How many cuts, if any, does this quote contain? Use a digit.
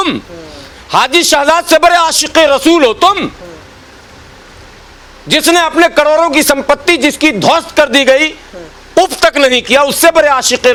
0